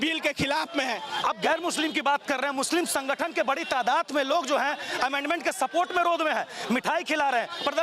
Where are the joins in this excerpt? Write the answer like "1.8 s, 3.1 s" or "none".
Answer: 1.2 s

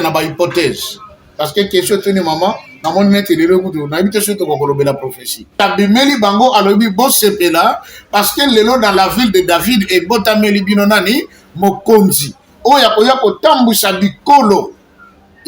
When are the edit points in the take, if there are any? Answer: 5.6 s

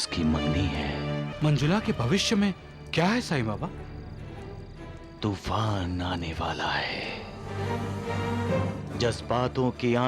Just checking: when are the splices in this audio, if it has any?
1.3 s

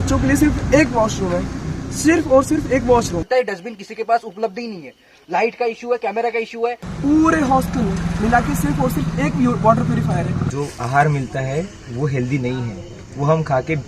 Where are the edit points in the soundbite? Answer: 3.2 s, 6.9 s, 10.4 s

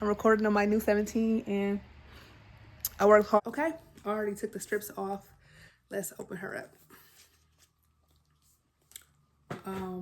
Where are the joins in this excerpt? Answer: 3.4 s

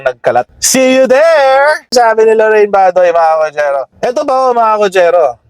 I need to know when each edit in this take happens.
3.9 s

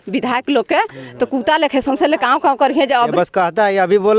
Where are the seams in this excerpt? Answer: 2.9 s

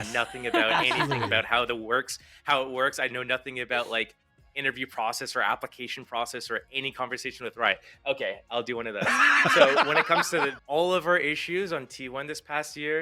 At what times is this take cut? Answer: 10.6 s

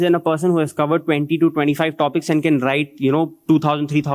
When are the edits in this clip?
none

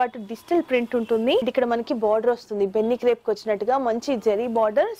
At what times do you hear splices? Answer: 1.4 s

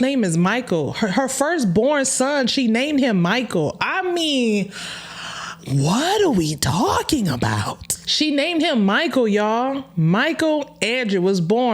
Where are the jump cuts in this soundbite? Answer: none

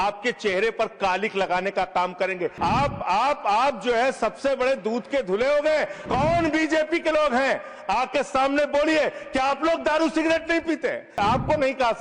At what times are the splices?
2.5 s, 6.0 s, 11.1 s

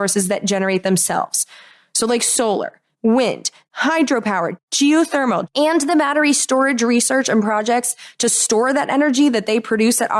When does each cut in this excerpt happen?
2.8 s, 3.6 s, 4.6 s, 5.5 s

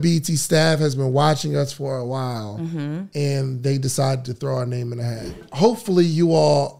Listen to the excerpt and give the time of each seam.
5.5 s

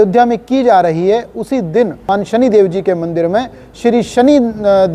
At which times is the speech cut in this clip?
2.1 s

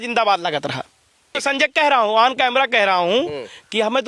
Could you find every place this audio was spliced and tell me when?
1.3 s

